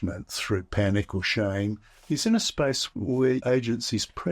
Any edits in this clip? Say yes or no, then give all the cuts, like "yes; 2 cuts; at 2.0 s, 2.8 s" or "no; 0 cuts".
yes; 1 cut; at 3.4 s